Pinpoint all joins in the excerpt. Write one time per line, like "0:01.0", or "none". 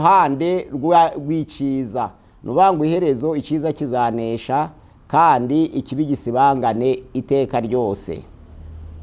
none